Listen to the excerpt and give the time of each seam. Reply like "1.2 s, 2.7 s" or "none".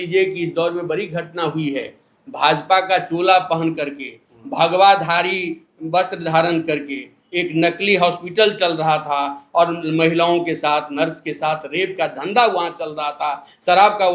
none